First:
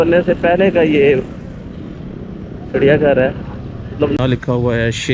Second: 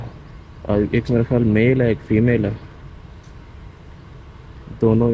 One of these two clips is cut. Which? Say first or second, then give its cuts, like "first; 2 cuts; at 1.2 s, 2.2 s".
first; 1 cut; at 4.2 s